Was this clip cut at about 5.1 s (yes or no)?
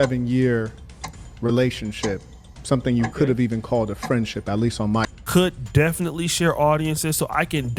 yes